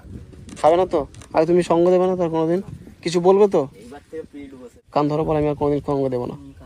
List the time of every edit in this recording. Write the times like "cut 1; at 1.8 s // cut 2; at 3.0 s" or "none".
cut 1; at 4.8 s